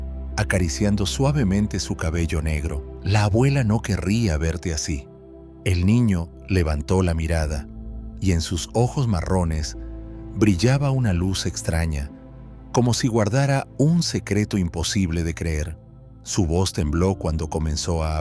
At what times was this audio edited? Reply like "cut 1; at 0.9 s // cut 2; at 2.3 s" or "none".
none